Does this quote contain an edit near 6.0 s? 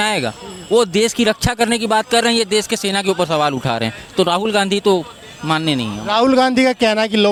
no; 0 cuts

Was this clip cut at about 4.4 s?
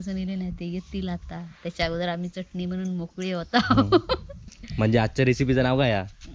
yes; 1 cut; at 4.4 s

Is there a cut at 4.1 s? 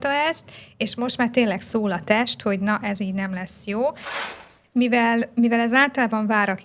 yes; 1 cut; at 4.1 s

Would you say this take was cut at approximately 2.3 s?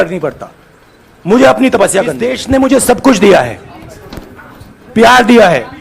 yes; 1 cut; at 2.3 s

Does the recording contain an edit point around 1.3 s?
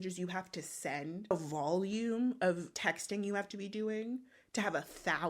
yes; 2 cuts; at 1.3 s, 2.7 s

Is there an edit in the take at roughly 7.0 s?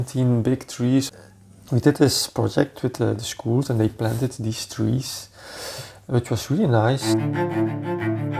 yes; 2 cuts; at 1.2 s, 7.0 s

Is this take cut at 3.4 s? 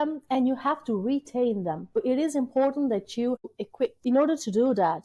yes; 2 cuts; at 2.0 s, 3.4 s

